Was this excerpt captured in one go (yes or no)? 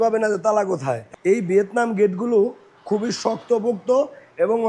no